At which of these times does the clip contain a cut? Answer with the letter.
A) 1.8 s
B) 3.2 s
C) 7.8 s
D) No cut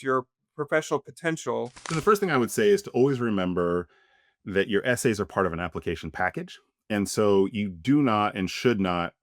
A